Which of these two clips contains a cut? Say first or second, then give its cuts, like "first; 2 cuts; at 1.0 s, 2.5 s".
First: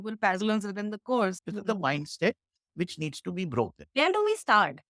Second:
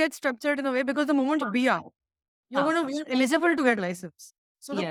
first; 1 cut; at 1.4 s